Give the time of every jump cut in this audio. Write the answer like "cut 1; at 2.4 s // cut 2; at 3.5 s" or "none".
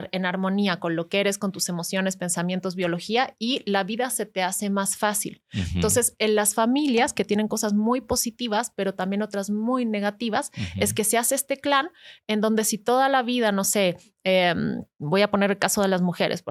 none